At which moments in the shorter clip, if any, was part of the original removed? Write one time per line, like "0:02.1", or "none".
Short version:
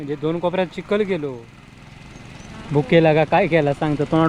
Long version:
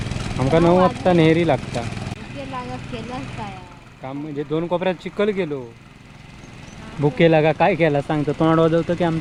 none